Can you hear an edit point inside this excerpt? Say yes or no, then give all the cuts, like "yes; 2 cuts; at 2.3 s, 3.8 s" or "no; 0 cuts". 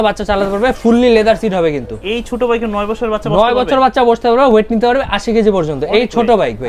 no; 0 cuts